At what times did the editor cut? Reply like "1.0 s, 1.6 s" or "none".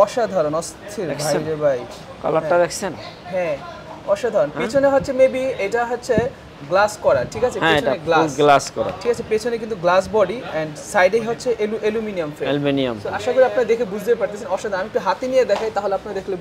none